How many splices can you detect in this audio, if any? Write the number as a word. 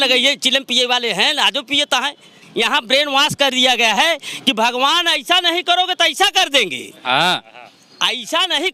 one